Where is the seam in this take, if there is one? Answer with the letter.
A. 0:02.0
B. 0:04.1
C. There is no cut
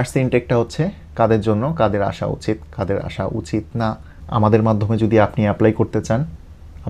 B